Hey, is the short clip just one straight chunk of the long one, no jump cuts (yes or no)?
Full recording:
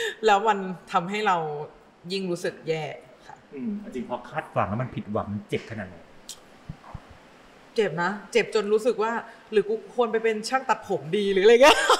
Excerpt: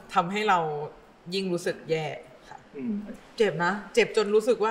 no